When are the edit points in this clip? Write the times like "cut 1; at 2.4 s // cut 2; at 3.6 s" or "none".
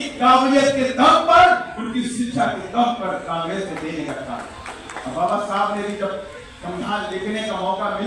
none